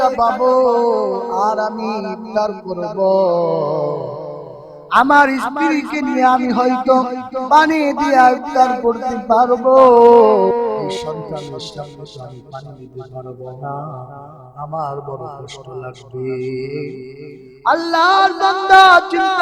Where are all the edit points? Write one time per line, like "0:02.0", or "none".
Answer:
0:11.0